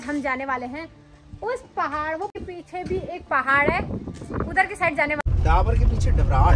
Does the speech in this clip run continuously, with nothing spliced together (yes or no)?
no